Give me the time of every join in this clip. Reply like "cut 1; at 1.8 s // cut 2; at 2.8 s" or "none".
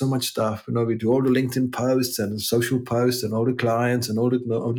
cut 1; at 1.0 s